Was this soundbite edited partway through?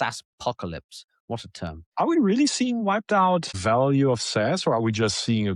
yes; 2 cuts; at 1.8 s, 3.5 s

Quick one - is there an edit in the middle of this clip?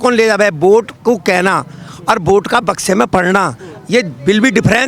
no; 0 cuts

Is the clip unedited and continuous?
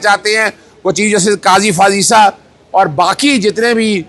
yes; 0 cuts

